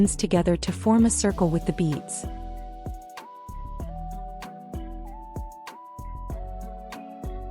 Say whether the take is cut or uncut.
uncut